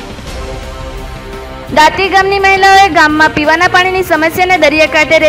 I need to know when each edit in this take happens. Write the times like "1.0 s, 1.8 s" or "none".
1.6 s